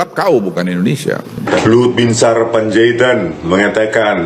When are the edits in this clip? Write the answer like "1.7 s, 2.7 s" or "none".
1.5 s